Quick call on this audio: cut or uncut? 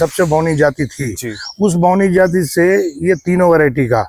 uncut